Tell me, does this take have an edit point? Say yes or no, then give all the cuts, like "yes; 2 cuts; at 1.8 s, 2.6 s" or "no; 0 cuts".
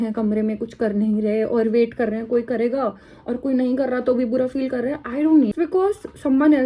yes; 1 cut; at 5.5 s